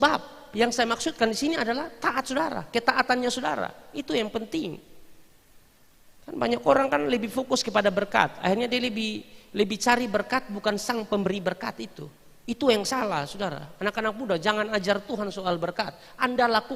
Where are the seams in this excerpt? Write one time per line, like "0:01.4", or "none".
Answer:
none